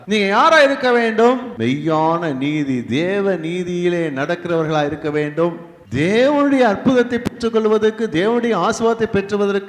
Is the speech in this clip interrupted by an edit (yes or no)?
yes